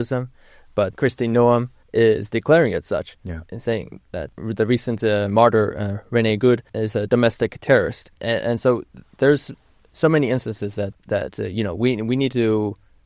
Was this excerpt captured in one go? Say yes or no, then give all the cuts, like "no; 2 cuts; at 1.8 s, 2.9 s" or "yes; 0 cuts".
no; 6 cuts; at 0.9 s, 1.8 s, 4.3 s, 6.8 s, 8.1 s, 10.9 s